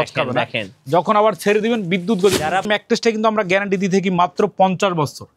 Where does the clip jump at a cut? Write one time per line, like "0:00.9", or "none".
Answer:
0:02.6

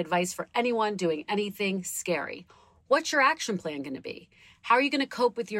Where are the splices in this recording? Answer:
none

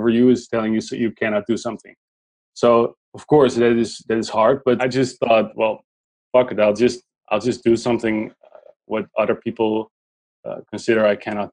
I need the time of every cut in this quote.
0:04.8

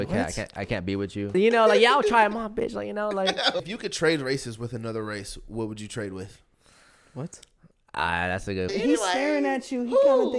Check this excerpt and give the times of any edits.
0:01.3
0:03.7
0:08.7

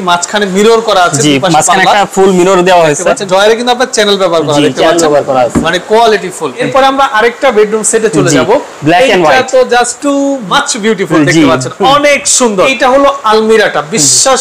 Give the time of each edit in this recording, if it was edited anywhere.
0:03.2
0:06.6
0:10.2
0:12.7

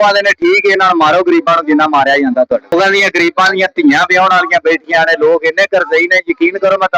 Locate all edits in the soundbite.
0:02.7

